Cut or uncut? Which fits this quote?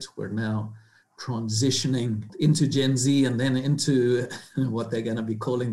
cut